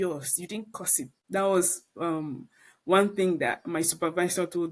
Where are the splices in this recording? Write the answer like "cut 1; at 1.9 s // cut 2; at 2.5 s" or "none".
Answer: cut 1; at 1.2 s